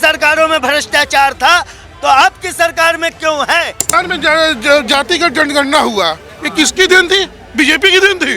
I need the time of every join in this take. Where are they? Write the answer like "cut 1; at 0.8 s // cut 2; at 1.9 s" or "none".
cut 1; at 3.9 s